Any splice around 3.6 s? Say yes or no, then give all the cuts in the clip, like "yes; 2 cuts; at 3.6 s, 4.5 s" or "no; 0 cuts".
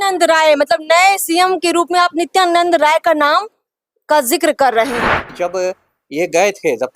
no; 1 cut; at 5.3 s